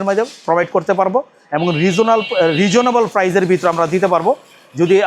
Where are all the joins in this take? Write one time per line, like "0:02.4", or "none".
none